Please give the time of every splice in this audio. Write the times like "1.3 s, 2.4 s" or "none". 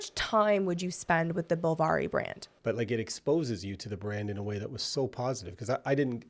2.4 s